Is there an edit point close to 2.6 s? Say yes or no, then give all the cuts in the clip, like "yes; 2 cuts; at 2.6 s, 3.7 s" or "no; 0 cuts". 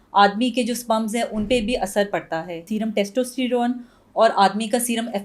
yes; 1 cut; at 2.6 s